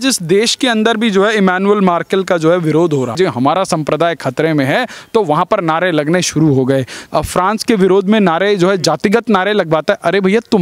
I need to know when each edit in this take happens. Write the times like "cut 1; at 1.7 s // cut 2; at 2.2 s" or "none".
cut 1; at 3.1 s // cut 2; at 7.0 s